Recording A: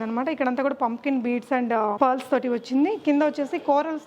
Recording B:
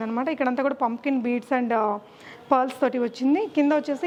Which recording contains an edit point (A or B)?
A